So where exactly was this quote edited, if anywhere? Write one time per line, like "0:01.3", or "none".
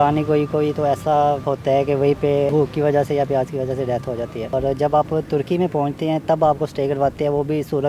0:01.4
0:02.5
0:04.5